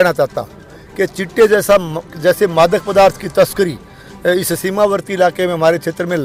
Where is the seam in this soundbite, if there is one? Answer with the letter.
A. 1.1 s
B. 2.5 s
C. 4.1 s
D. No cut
D